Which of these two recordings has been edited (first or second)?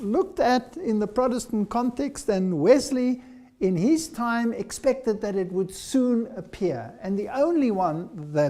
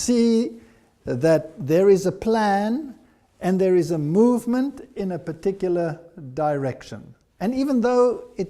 second